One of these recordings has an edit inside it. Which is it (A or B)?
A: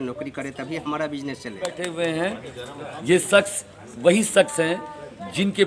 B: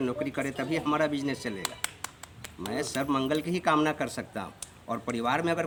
A